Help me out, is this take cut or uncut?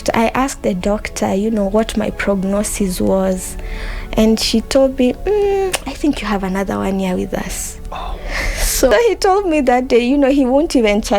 cut